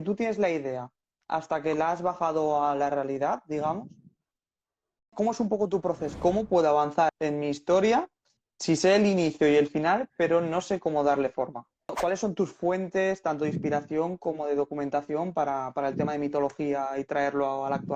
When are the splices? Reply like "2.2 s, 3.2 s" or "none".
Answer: 5.0 s, 6.1 s, 7.2 s, 11.9 s